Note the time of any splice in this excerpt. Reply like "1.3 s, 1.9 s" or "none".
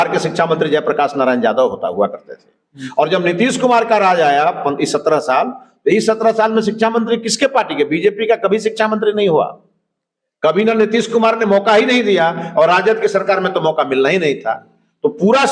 none